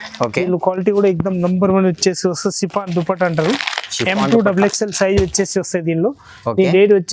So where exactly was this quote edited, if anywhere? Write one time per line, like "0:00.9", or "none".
none